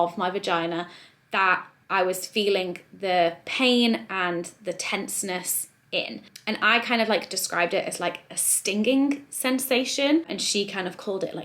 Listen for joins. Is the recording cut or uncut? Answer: uncut